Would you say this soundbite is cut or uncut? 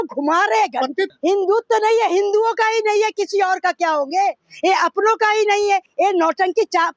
cut